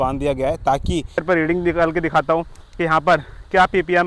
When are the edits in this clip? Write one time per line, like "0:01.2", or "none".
0:01.2